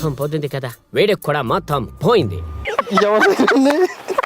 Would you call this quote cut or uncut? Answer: uncut